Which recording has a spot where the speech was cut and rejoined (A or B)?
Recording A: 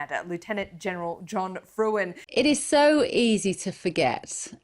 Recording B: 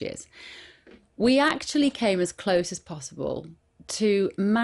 A